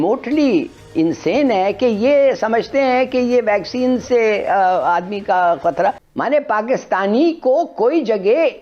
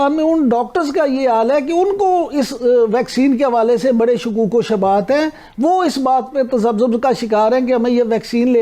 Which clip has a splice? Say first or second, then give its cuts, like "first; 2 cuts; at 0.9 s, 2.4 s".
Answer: first; 1 cut; at 6.0 s